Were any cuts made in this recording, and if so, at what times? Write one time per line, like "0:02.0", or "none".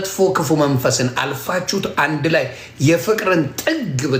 none